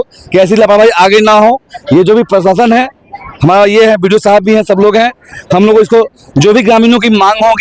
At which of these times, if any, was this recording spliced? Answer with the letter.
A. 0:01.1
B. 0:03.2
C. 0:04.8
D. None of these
D